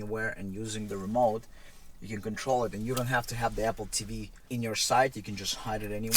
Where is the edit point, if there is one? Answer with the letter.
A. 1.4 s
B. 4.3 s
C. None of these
B